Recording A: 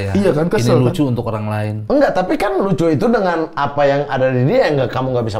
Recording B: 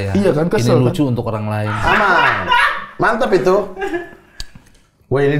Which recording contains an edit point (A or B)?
B